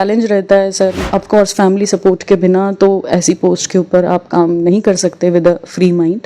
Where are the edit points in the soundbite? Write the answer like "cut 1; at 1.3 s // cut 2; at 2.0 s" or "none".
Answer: cut 1; at 1.0 s